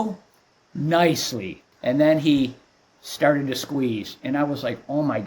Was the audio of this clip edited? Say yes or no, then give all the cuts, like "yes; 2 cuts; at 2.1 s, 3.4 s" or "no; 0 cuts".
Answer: yes; 1 cut; at 1.7 s